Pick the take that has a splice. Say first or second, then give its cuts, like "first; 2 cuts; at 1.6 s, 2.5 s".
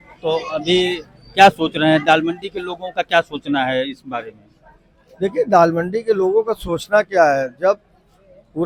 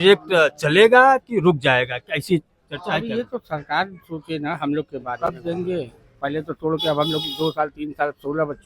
second; 1 cut; at 5.2 s